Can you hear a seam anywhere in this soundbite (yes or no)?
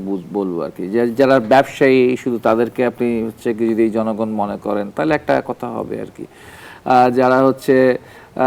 no